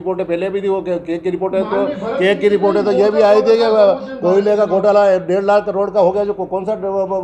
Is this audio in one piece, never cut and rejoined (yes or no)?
yes